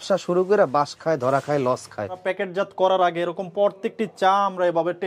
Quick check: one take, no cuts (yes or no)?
no